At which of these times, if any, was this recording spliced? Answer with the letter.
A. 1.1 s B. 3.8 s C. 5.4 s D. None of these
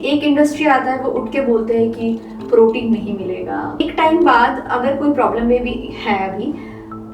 B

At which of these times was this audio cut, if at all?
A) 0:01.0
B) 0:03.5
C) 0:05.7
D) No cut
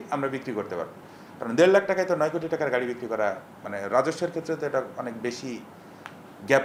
D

